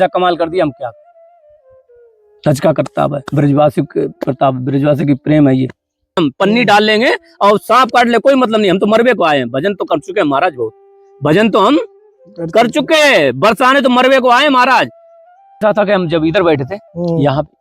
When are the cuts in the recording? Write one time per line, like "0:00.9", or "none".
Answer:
0:06.2
0:15.6